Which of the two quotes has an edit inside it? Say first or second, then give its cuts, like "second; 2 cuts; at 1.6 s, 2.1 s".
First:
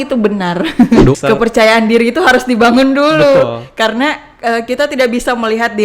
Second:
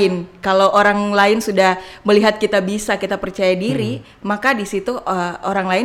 first; 1 cut; at 1.2 s